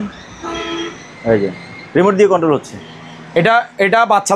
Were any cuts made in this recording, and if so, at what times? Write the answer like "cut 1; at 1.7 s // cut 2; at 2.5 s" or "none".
none

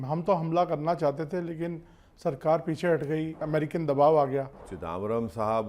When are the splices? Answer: cut 1; at 3.4 s // cut 2; at 4.7 s

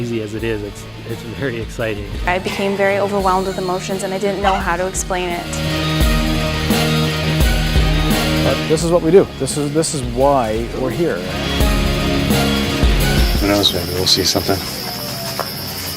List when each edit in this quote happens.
cut 1; at 12.6 s

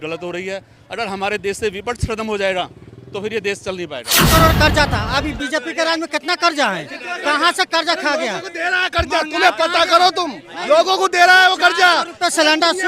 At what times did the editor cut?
cut 1; at 4.1 s

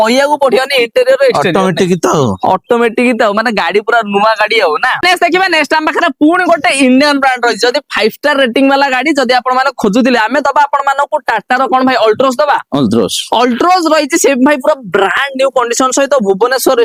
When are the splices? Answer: none

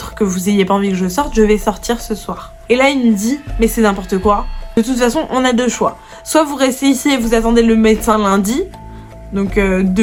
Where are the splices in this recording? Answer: none

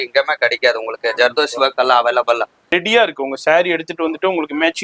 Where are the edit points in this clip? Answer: cut 1; at 2.6 s

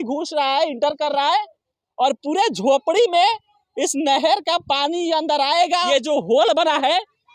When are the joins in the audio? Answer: cut 1; at 5.8 s

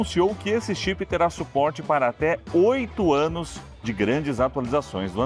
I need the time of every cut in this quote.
none

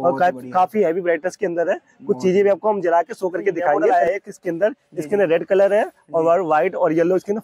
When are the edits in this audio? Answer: cut 1; at 3.9 s

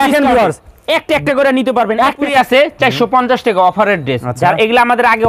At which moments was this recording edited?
cut 1; at 2.3 s

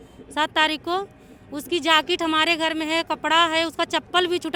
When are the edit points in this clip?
none

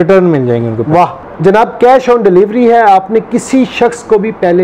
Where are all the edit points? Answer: cut 1; at 1.2 s

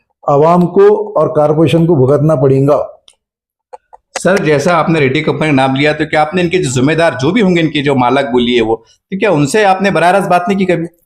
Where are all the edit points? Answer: none

